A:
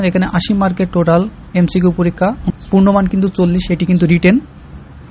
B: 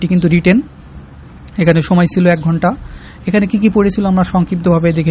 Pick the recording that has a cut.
A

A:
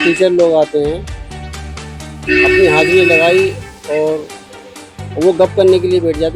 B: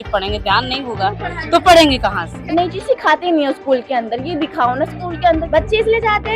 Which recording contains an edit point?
B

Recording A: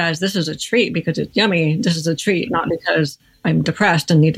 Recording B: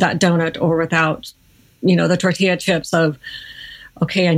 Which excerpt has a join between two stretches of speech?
A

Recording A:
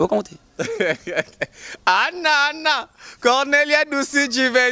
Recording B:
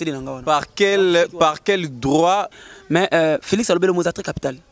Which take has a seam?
B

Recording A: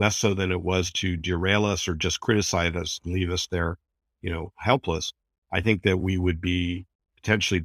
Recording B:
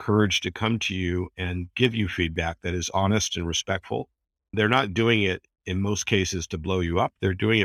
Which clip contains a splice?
B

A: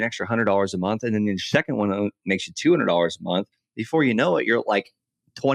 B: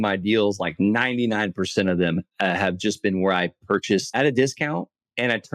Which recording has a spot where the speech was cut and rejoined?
B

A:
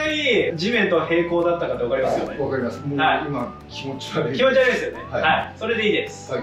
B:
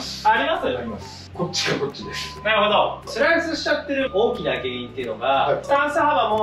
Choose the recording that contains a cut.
B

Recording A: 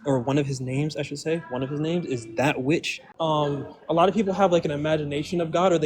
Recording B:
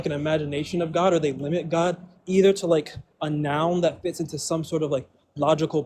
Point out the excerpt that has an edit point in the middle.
A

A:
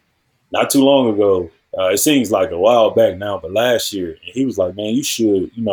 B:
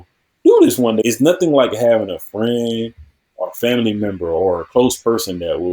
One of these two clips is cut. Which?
B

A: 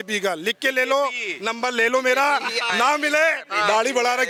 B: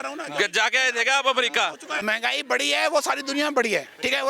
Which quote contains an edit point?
B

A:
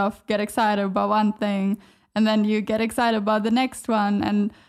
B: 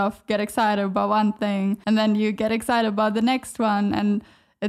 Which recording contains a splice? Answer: B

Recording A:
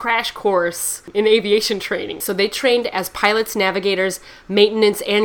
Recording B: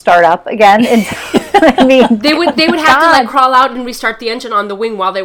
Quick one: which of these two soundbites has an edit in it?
A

